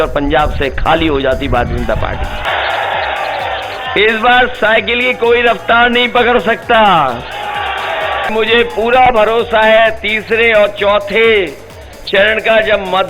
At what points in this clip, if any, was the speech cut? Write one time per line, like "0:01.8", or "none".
0:02.5
0:08.3